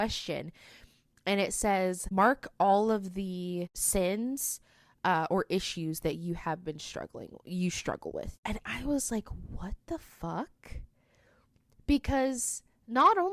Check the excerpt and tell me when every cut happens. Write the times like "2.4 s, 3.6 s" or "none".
3.8 s, 8.3 s